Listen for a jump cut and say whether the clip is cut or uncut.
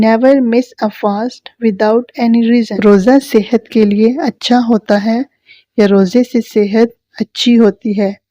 cut